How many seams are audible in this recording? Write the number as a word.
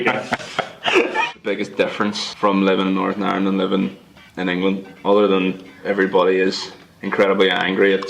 three